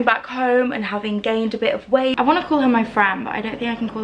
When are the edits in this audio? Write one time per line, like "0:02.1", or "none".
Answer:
0:02.1